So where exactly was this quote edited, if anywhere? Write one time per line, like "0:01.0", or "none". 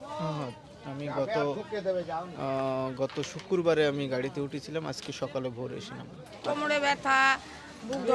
0:06.3